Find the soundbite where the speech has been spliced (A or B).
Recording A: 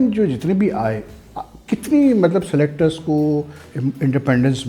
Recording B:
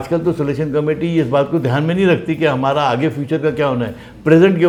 A